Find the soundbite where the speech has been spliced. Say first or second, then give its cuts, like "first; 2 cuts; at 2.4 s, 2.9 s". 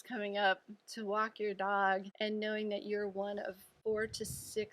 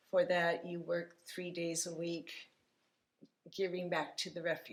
first; 2 cuts; at 2.1 s, 3.7 s